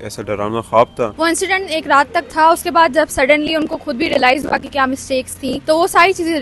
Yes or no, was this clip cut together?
yes